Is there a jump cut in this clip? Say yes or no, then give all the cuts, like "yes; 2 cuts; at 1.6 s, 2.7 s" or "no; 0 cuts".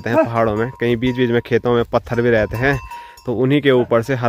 no; 0 cuts